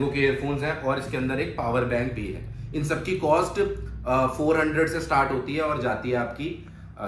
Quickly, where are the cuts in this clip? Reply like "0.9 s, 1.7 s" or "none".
none